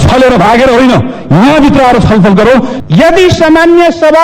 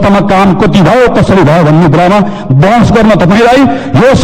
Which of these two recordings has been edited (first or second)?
first